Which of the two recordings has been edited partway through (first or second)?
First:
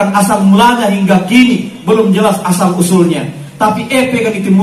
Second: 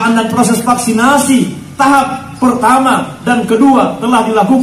first